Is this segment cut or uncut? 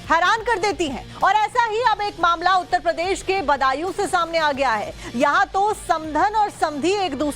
uncut